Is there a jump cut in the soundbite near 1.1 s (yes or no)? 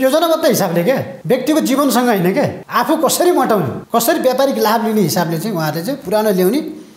yes